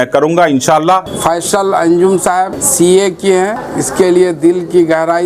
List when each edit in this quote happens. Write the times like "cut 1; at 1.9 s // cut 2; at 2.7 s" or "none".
cut 1; at 1.1 s // cut 2; at 2.6 s // cut 3; at 3.7 s

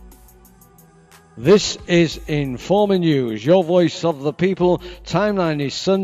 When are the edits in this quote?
none

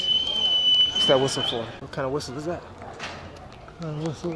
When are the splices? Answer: cut 1; at 1.8 s

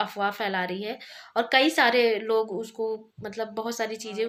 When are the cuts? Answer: none

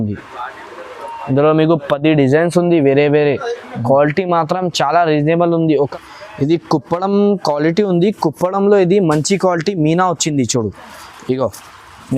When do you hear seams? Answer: cut 1; at 6.0 s

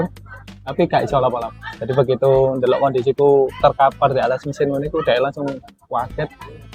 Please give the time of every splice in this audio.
cut 1; at 1.6 s

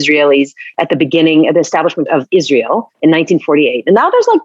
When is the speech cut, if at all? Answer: cut 1; at 2.0 s

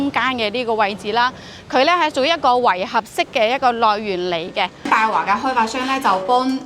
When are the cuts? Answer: cut 1; at 4.9 s

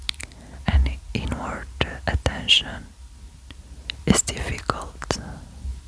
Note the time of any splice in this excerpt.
none

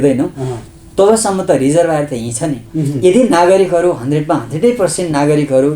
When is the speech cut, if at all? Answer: cut 1; at 2.6 s

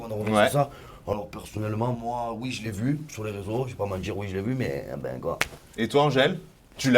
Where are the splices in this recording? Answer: none

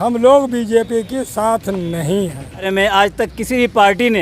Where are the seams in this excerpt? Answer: cut 1; at 2.7 s

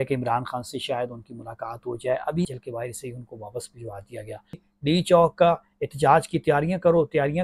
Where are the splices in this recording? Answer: cut 1; at 2.5 s // cut 2; at 4.6 s

